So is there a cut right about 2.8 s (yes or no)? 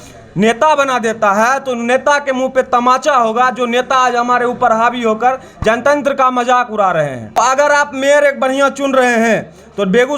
no